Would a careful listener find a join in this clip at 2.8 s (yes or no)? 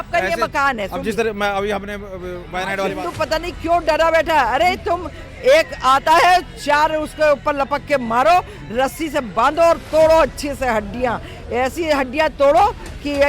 yes